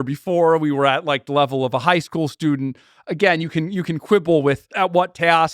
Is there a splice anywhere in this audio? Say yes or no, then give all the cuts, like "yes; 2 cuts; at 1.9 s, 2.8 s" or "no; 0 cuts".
no; 0 cuts